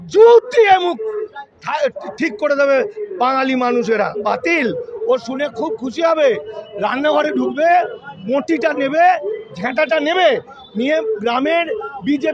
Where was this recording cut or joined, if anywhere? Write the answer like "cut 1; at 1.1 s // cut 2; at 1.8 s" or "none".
cut 1; at 4.2 s